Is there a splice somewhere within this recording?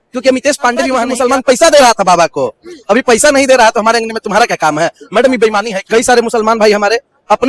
yes; 2 cuts; at 1.1 s, 5.7 s

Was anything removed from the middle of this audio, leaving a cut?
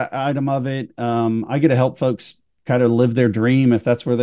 no; 0 cuts

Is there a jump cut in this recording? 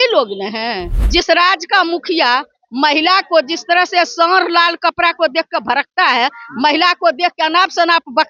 yes; 1 cut; at 0.9 s

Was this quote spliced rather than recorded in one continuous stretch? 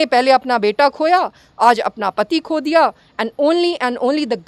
no; 0 cuts

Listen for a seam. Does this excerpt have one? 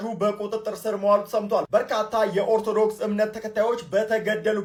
no; 0 cuts

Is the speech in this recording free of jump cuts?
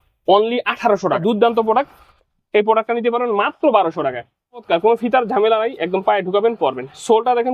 no; 2 cuts; at 1.2 s, 4.6 s

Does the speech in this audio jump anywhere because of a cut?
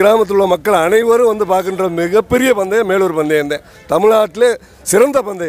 no; 0 cuts

